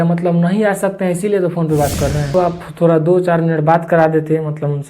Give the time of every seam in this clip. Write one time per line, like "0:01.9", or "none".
0:02.3